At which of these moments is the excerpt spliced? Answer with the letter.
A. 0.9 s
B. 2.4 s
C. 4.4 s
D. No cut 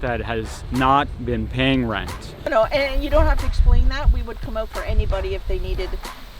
B